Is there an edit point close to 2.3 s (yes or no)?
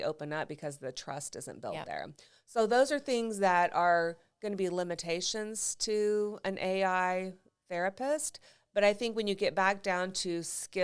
no